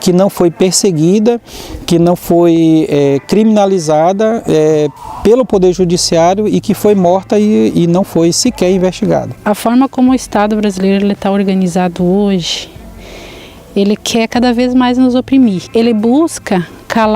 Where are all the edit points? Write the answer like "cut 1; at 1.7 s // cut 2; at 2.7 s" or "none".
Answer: cut 1; at 9.3 s // cut 2; at 15.7 s